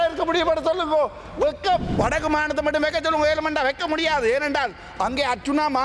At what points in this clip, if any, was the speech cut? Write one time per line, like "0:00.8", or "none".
0:01.9